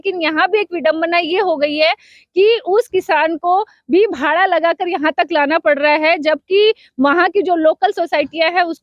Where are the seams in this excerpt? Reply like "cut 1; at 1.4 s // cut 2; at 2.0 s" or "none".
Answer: none